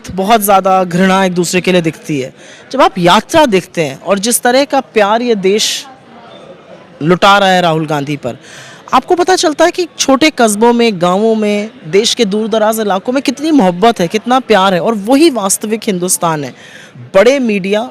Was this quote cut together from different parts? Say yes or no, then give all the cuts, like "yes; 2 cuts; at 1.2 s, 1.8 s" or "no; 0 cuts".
yes; 1 cut; at 16.8 s